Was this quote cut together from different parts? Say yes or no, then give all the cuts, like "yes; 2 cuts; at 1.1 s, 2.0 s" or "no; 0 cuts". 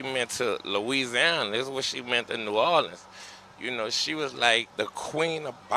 yes; 1 cut; at 4.7 s